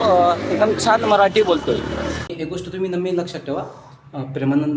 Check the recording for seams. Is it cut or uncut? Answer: cut